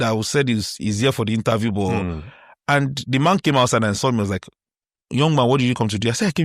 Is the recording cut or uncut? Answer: uncut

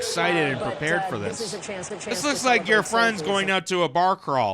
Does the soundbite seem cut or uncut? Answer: cut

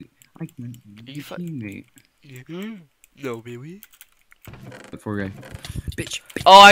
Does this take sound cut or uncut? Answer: uncut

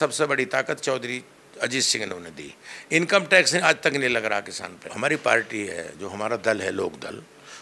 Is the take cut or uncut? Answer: cut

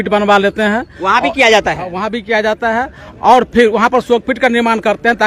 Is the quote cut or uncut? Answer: uncut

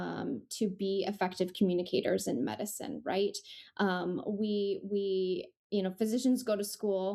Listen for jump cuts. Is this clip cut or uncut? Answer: uncut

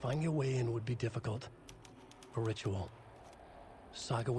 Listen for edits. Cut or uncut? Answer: uncut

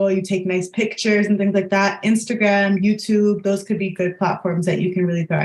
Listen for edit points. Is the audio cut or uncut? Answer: uncut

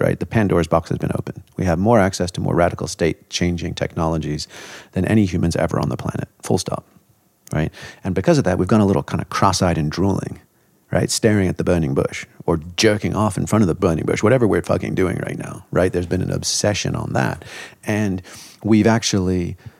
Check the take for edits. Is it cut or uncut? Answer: uncut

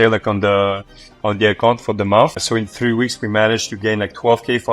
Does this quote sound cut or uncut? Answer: cut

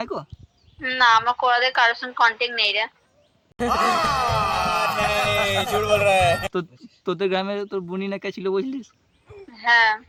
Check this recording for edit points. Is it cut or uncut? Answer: uncut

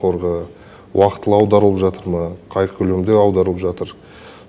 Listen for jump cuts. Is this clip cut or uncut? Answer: uncut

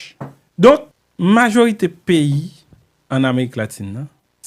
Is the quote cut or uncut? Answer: cut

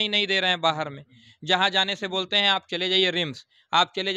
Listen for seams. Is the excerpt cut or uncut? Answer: uncut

